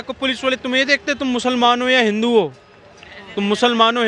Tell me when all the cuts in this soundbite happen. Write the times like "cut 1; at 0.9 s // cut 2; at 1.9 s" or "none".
none

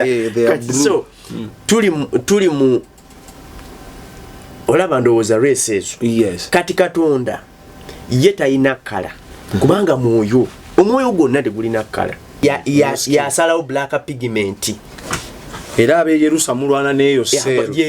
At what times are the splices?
cut 1; at 12.4 s

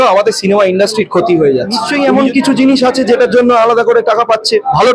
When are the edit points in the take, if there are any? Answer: cut 1; at 1.9 s

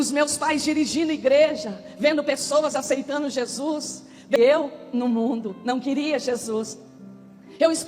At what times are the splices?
cut 1; at 4.4 s

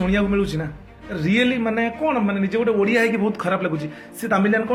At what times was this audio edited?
none

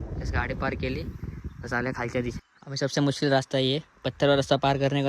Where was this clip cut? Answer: cut 1; at 2.4 s

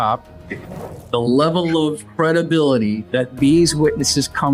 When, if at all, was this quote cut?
cut 1; at 0.8 s // cut 2; at 2.0 s // cut 3; at 3.0 s

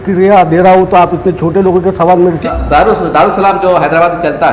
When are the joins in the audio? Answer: cut 1; at 2.5 s

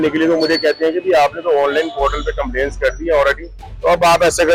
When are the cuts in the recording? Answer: none

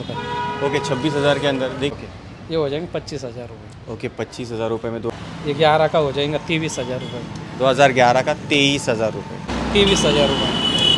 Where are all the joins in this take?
cut 1; at 1.9 s // cut 2; at 5.1 s // cut 3; at 9.5 s

